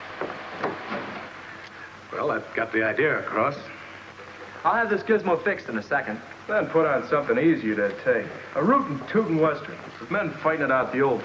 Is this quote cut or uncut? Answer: cut